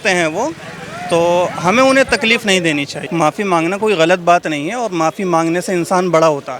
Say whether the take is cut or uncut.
cut